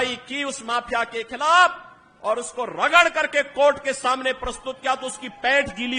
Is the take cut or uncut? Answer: uncut